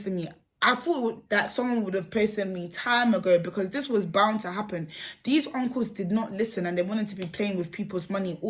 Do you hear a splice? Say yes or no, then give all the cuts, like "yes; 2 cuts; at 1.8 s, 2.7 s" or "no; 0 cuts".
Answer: no; 0 cuts